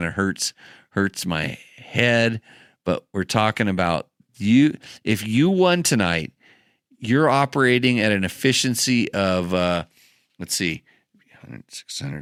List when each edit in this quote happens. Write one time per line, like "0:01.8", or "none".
none

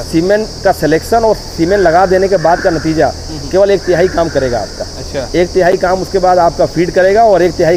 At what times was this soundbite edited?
none

